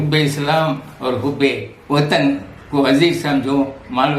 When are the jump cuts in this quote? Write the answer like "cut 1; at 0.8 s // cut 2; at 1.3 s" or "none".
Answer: cut 1; at 1.7 s